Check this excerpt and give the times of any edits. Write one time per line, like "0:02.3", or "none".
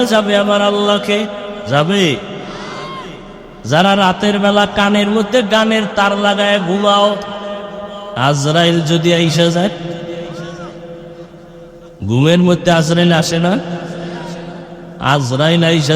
0:01.5
0:08.1